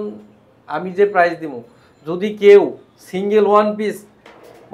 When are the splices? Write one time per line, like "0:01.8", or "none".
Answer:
none